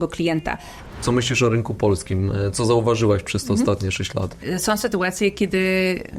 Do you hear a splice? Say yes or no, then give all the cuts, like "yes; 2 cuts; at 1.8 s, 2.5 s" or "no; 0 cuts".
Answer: yes; 2 cuts; at 0.9 s, 4.5 s